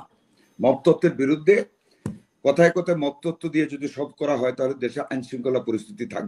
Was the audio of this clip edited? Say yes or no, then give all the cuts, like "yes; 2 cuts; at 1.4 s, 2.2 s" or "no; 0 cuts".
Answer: no; 0 cuts